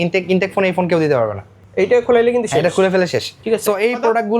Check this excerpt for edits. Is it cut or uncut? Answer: uncut